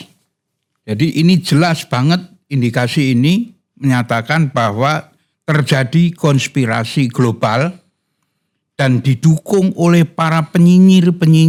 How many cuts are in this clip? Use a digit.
0